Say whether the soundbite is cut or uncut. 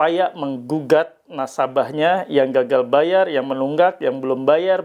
uncut